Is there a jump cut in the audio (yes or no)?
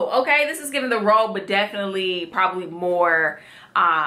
no